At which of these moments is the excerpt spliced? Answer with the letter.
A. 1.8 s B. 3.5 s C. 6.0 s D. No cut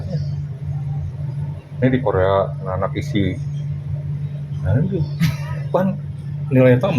D